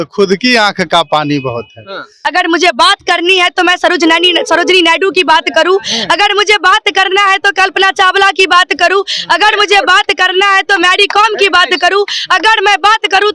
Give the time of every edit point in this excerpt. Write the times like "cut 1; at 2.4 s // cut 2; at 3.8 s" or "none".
cut 1; at 2.1 s